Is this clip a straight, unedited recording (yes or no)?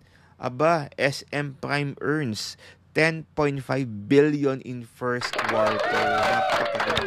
no